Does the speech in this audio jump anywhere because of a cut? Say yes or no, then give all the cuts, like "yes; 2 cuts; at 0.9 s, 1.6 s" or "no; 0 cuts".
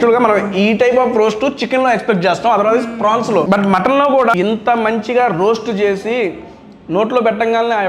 yes; 2 cuts; at 3.5 s, 4.3 s